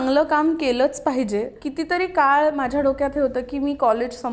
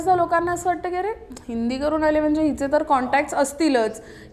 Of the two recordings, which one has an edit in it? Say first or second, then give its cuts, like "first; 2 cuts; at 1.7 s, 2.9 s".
first; 1 cut; at 1.6 s